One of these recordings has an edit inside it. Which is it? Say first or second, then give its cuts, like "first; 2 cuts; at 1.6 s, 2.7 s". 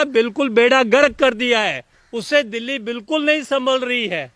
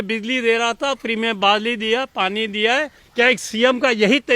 second; 1 cut; at 3.0 s